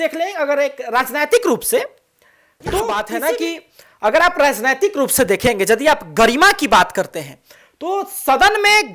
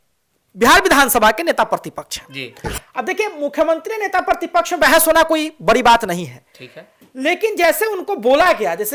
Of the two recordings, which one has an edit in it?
first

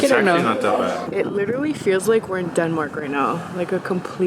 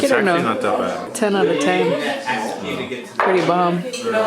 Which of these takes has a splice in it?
first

